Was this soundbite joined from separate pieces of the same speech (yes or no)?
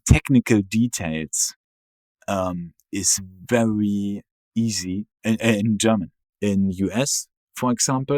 yes